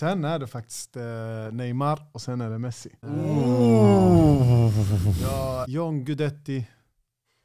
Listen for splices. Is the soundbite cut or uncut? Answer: cut